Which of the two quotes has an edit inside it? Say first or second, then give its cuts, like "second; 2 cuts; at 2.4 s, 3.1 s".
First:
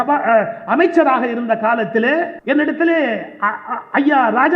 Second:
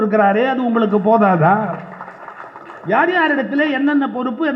first; 1 cut; at 2.4 s